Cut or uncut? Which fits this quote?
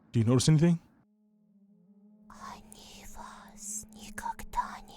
cut